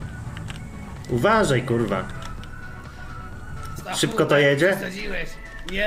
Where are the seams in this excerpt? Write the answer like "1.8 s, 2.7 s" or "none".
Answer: none